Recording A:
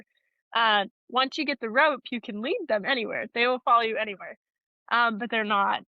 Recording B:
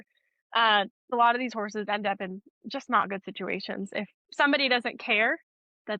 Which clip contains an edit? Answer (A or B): B